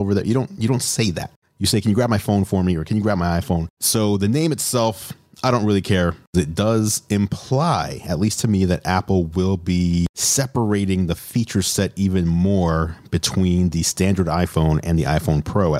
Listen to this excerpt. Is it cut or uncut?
cut